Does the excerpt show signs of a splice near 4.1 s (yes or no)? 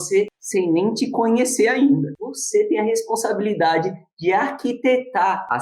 no